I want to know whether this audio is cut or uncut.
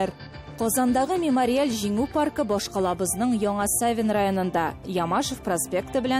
uncut